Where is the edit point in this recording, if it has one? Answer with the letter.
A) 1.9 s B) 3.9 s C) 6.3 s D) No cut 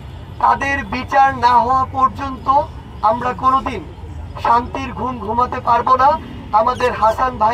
D